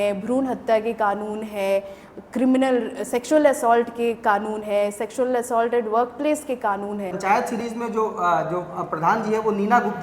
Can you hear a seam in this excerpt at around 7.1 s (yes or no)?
yes